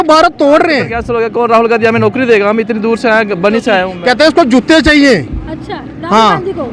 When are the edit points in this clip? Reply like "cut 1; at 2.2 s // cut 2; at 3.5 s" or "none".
cut 1; at 0.9 s // cut 2; at 3.9 s